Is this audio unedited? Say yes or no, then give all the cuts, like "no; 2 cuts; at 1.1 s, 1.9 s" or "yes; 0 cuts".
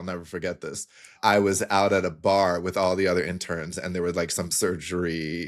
no; 1 cut; at 1.1 s